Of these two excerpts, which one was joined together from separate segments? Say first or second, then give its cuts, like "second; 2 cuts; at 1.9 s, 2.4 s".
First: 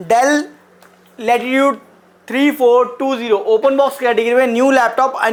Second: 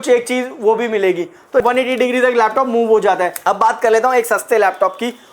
second; 2 cuts; at 1.6 s, 3.4 s